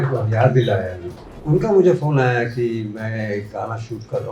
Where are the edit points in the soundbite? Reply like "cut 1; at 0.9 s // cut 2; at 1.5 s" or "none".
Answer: cut 1; at 1.4 s